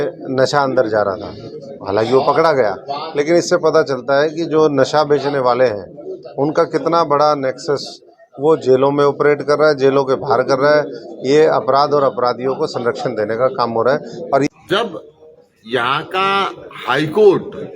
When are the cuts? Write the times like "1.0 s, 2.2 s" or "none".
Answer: 14.5 s